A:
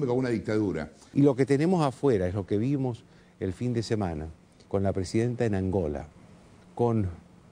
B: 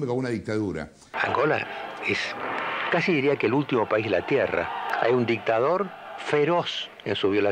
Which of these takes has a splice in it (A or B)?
B